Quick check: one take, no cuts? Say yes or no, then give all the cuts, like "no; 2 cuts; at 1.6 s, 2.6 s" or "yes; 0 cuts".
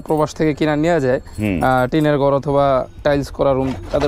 yes; 0 cuts